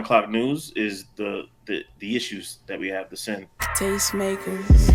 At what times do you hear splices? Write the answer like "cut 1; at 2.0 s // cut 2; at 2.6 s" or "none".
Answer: cut 1; at 3.7 s